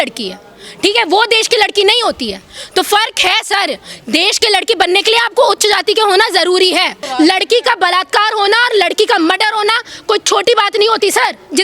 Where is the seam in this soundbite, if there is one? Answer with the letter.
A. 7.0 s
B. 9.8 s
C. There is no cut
A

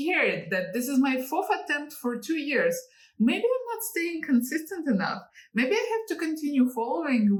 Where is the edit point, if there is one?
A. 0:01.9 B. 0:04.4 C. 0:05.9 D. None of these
D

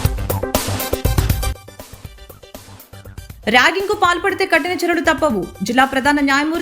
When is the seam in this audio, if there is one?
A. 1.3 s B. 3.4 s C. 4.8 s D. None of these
B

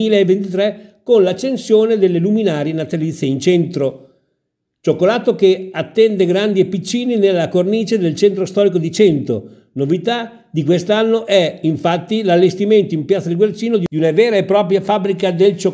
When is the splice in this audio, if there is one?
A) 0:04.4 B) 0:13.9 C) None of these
B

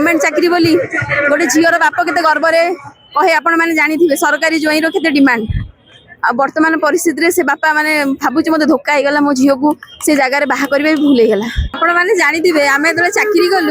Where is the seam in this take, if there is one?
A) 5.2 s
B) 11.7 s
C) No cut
B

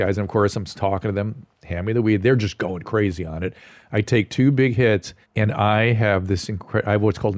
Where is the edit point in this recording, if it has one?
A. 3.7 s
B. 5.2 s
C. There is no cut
B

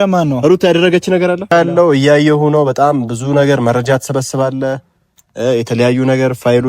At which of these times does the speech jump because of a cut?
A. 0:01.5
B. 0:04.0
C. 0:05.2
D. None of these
A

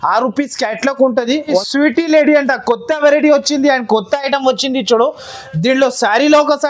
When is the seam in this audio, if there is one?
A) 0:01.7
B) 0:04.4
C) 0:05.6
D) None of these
A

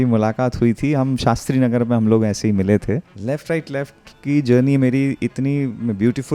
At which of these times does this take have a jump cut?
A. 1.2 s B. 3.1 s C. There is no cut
B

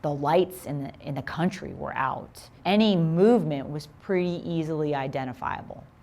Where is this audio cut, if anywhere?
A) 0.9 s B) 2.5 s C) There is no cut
B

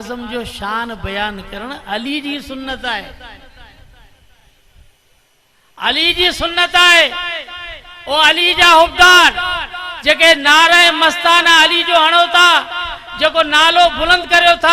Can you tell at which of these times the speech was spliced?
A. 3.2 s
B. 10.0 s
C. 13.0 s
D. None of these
D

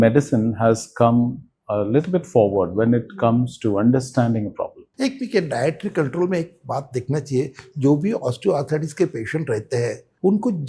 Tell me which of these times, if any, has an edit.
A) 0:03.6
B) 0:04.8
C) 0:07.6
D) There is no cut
B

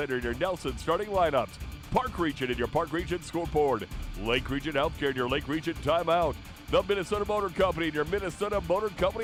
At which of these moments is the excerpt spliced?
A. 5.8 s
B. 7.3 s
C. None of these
C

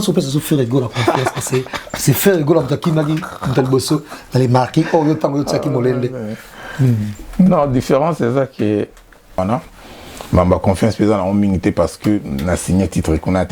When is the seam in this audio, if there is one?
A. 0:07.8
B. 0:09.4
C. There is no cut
B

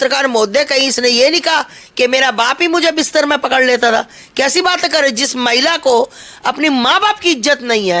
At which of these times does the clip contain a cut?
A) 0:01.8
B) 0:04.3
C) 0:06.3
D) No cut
D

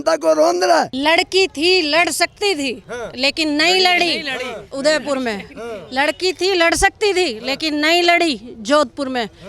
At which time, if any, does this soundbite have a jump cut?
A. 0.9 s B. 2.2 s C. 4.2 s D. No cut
A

